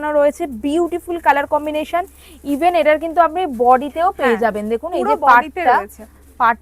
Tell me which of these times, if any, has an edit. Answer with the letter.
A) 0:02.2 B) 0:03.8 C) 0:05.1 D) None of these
D